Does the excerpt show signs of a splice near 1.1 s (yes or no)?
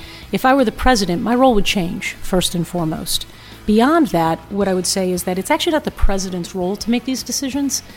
no